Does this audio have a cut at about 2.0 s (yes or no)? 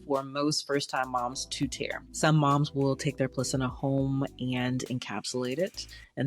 yes